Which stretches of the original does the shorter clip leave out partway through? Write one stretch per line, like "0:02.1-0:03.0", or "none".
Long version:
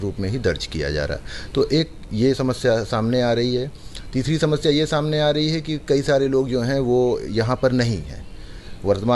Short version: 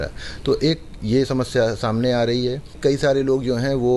0:03.8-0:05.7